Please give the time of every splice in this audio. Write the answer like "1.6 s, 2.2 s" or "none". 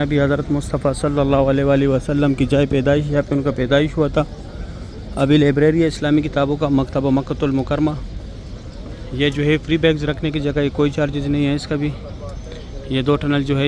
none

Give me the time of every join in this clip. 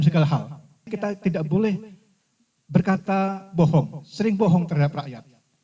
0.9 s

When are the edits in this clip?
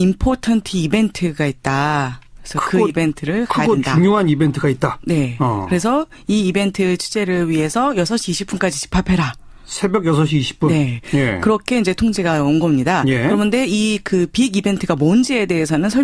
none

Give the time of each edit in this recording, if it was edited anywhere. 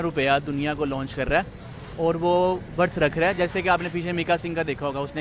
none

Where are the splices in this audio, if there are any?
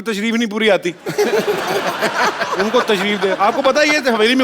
none

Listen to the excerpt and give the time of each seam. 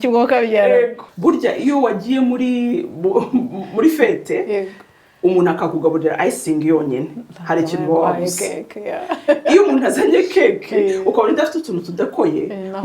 1.0 s

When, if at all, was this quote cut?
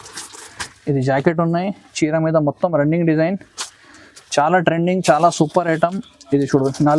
none

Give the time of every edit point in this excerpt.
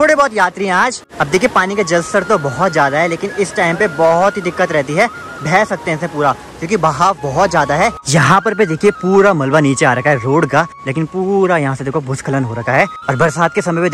1.0 s, 8.0 s, 10.8 s, 13.0 s

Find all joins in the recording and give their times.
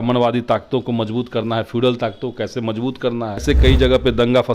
3.4 s

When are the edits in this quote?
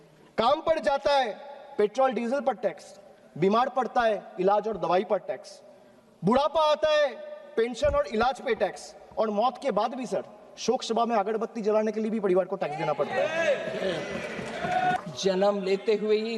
15.0 s

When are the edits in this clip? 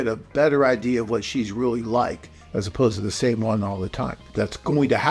4.2 s

